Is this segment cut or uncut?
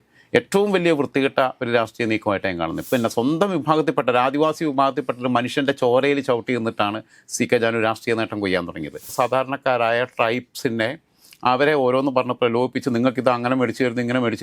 cut